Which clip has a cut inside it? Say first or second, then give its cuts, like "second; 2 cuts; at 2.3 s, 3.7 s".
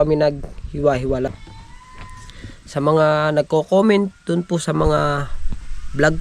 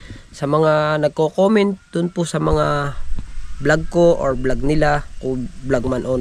first; 1 cut; at 1.3 s